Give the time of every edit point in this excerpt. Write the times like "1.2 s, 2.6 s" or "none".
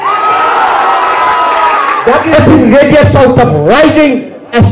2.3 s